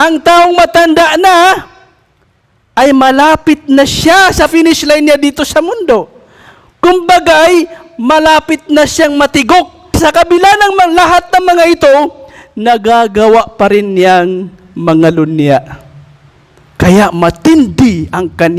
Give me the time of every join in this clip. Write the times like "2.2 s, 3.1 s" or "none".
4.5 s, 9.9 s